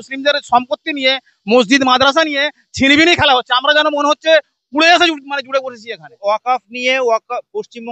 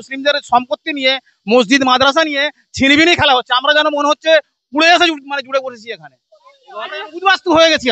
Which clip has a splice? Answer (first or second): first